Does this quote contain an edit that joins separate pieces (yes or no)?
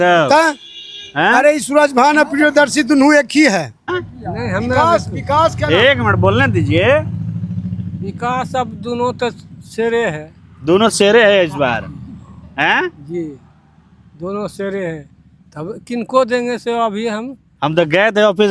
yes